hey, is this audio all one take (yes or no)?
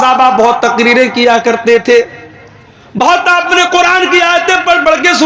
yes